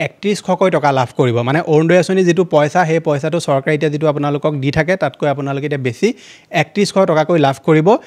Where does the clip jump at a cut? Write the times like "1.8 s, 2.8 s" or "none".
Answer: none